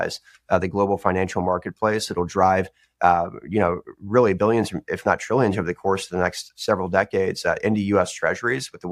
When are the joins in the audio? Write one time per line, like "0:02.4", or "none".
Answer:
none